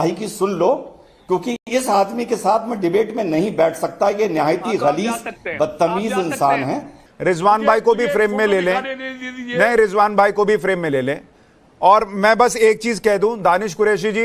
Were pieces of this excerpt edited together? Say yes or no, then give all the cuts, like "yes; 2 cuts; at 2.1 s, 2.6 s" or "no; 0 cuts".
yes; 1 cut; at 6.9 s